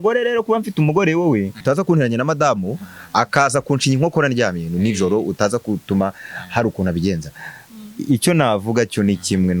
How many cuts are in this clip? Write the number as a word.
one